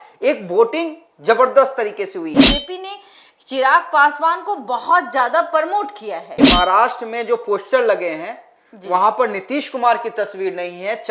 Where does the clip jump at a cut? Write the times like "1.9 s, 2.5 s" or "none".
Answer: 2.3 s, 6.4 s